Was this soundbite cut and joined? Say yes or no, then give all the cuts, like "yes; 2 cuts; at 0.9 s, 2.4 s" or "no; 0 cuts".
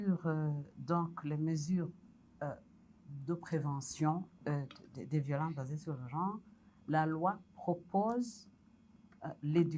no; 0 cuts